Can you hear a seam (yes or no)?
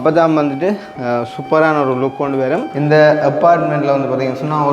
yes